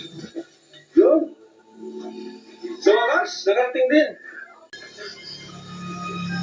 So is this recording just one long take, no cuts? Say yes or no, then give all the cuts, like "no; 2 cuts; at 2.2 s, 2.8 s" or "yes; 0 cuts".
no; 1 cut; at 4.7 s